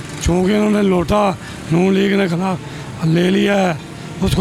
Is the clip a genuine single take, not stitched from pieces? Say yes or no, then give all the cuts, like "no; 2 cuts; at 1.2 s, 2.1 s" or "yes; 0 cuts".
yes; 0 cuts